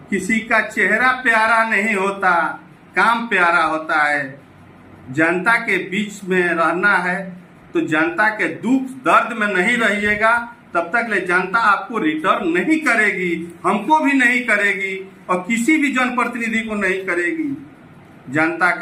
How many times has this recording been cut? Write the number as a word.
zero